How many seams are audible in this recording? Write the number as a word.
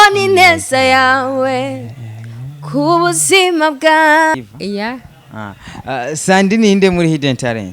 one